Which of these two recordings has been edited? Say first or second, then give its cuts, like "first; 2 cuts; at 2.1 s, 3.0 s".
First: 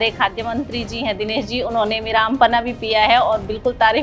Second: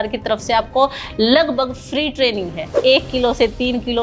second; 1 cut; at 2.8 s